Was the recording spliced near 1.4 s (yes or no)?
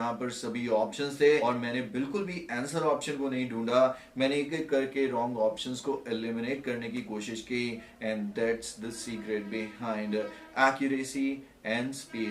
yes